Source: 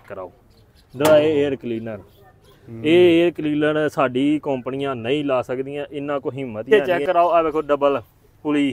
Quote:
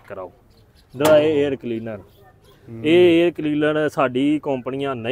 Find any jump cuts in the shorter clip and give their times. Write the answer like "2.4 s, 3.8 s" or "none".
none